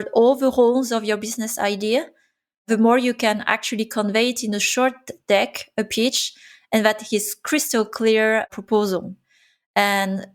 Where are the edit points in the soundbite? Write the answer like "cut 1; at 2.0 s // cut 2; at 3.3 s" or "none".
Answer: none